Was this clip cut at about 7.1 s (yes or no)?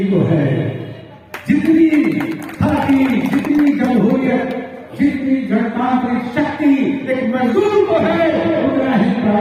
no